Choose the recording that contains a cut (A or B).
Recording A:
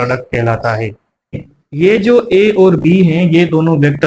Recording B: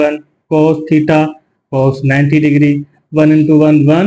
A